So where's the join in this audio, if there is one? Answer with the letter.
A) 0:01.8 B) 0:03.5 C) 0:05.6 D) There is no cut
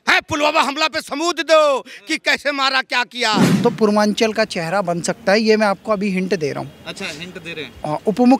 B